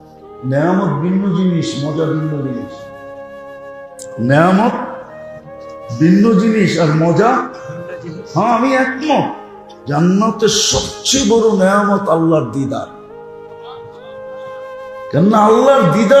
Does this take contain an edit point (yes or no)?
yes